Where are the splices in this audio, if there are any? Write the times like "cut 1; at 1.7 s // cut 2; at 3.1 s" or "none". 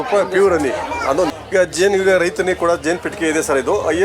cut 1; at 1.3 s